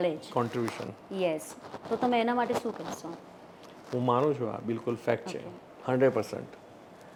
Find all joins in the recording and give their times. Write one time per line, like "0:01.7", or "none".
none